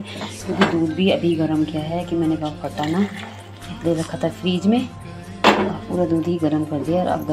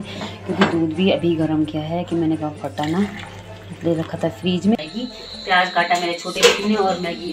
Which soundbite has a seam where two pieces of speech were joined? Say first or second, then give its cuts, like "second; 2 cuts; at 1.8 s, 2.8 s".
second; 1 cut; at 4.8 s